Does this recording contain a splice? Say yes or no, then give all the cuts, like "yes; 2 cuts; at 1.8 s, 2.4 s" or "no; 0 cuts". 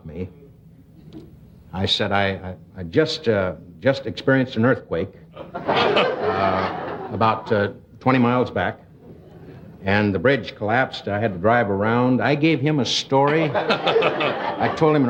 no; 0 cuts